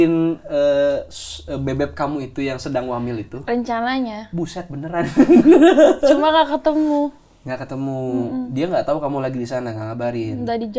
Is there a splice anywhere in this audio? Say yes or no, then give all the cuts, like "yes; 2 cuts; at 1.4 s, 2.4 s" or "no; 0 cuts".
no; 0 cuts